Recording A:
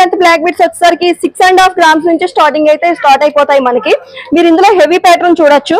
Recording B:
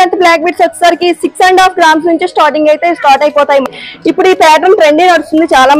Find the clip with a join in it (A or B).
B